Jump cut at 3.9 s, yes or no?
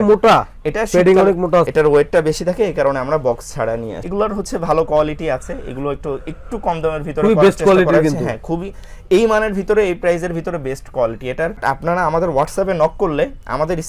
yes